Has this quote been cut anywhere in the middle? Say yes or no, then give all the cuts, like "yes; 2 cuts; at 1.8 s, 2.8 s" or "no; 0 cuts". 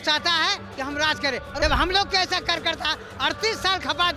yes; 1 cut; at 1.6 s